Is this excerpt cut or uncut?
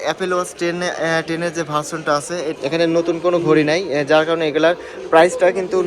cut